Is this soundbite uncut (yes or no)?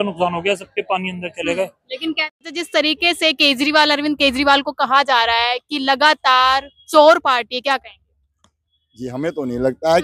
yes